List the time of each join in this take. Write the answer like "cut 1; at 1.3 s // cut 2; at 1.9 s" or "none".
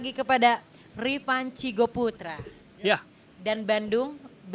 none